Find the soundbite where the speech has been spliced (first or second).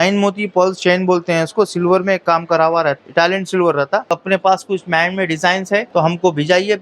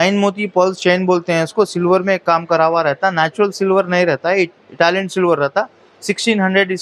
first